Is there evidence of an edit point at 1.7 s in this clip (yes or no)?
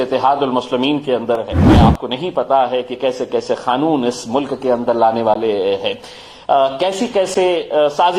yes